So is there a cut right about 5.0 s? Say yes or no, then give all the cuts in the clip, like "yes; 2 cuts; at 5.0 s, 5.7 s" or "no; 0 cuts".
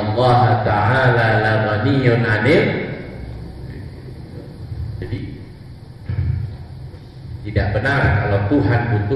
yes; 1 cut; at 5.0 s